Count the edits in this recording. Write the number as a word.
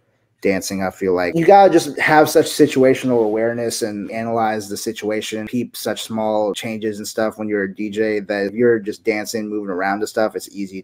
six